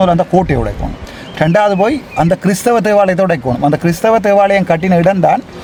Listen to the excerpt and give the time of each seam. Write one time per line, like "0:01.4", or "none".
none